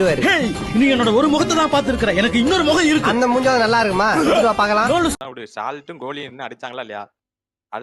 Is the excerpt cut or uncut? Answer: cut